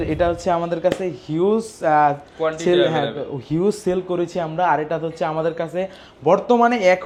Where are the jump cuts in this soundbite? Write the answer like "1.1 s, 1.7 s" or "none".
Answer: none

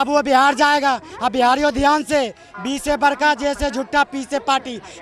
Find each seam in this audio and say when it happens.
none

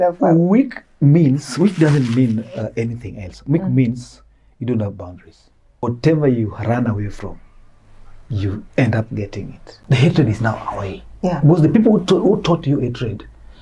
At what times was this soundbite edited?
5.8 s, 9.6 s

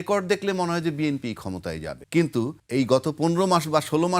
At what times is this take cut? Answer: 1.9 s, 2.6 s

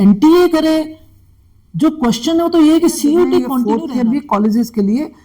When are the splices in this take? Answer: 3.6 s

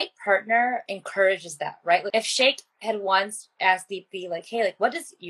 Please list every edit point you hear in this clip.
0.9 s, 2.1 s

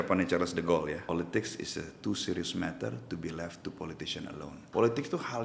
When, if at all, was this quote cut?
1.1 s, 4.6 s

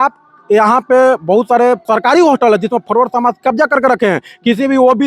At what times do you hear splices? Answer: 1.8 s

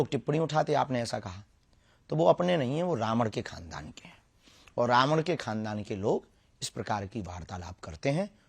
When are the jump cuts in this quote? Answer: none

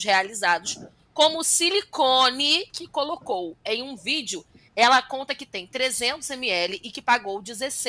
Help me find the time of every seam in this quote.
none

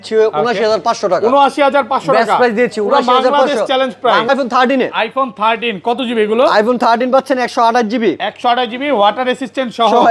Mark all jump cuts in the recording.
4.3 s

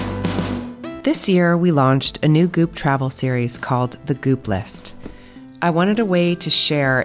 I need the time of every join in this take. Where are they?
1.0 s

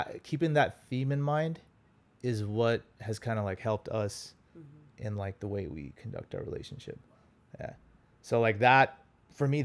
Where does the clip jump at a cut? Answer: none

